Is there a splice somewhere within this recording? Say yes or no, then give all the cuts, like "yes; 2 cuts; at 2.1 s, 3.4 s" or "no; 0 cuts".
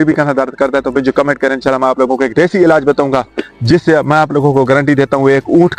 no; 0 cuts